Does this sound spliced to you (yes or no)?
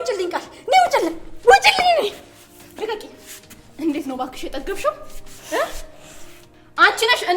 no